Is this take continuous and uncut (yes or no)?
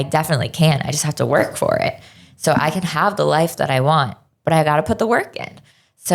yes